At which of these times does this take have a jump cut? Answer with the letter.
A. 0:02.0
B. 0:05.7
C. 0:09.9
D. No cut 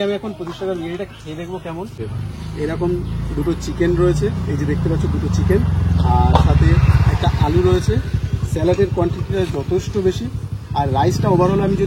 A